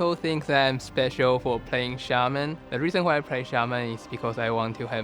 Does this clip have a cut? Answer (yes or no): yes